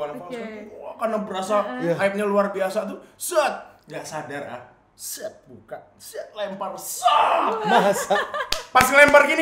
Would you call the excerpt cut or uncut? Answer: uncut